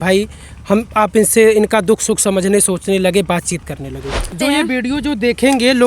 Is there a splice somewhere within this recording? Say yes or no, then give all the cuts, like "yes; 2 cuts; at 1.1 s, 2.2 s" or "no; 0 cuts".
yes; 1 cut; at 4.2 s